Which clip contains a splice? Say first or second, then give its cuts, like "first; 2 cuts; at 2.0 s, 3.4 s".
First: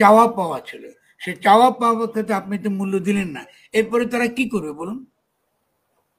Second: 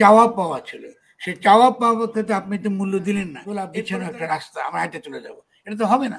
second; 1 cut; at 3.7 s